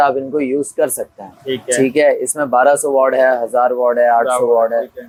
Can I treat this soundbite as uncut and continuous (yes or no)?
yes